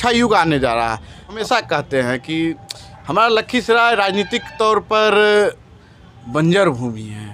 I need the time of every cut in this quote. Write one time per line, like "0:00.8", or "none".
0:01.4

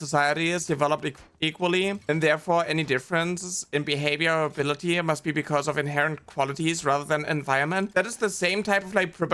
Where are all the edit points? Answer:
0:07.9

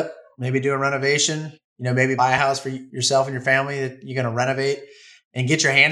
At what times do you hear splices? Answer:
0:02.2

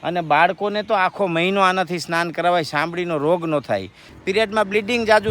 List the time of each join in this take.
0:04.1

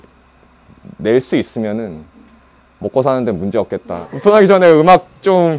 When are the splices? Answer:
0:04.0

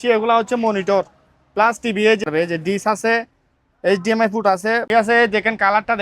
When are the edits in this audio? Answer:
0:02.2
0:04.8

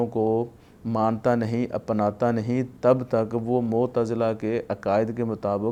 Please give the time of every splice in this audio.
none

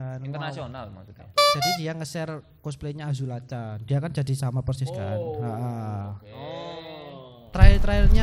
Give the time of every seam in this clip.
0:01.8

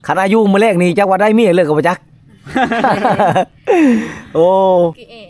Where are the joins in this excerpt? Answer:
none

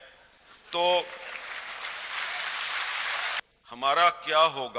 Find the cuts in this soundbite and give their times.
0:03.4

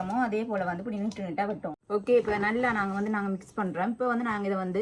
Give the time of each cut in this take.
0:01.7

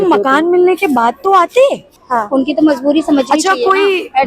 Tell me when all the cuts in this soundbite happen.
0:02.0

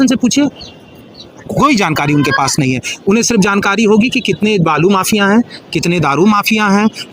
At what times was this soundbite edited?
none

